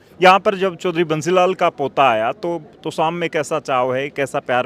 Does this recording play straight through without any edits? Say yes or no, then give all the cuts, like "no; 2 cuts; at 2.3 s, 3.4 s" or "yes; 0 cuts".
yes; 0 cuts